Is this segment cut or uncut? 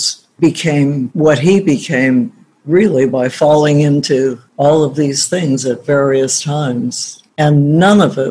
cut